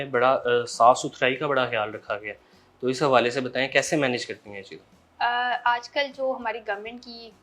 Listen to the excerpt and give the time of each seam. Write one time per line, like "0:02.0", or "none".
none